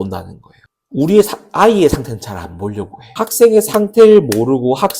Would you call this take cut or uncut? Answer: cut